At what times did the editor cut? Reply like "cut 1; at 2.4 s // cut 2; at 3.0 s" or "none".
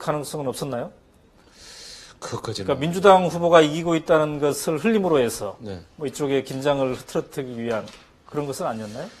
cut 1; at 6.5 s